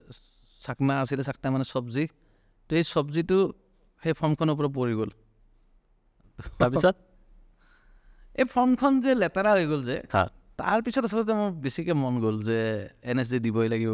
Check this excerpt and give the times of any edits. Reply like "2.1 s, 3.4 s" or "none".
none